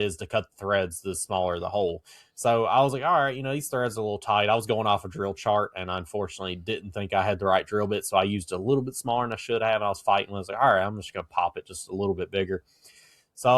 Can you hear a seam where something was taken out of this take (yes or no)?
no